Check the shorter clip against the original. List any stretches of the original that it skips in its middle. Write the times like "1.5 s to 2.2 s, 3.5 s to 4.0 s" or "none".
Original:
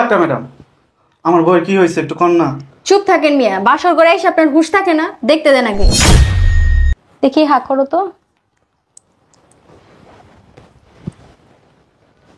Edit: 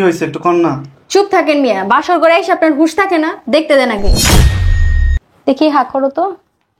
none